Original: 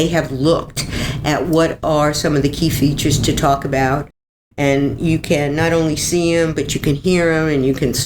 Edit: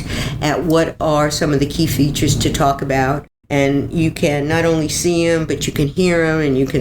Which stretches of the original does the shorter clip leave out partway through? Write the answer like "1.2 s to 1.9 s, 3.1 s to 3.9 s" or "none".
4.2 s to 4.4 s